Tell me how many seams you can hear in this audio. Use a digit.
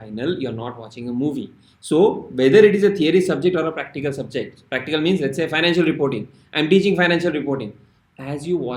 0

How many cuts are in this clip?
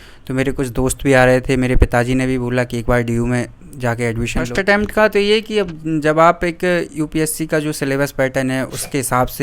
1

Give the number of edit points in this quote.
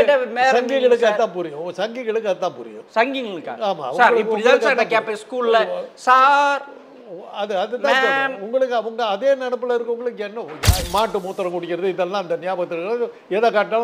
1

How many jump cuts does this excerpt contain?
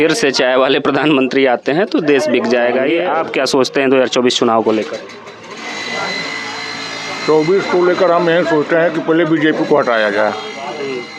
1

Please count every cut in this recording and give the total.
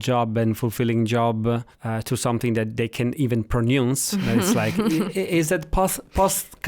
1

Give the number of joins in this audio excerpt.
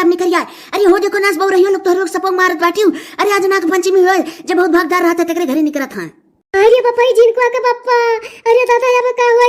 0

